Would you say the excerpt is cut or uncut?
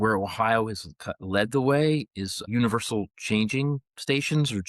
cut